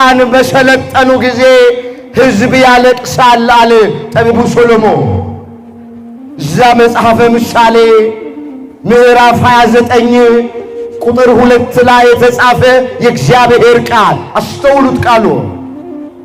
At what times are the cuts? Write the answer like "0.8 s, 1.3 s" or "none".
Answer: none

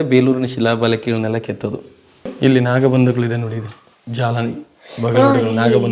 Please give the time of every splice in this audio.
2.3 s

